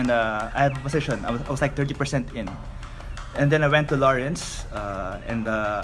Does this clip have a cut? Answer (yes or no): no